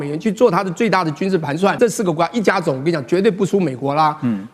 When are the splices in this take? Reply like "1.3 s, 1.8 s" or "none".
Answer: 1.8 s